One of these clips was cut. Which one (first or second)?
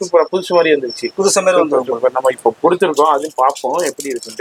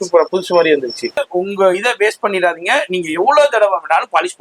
second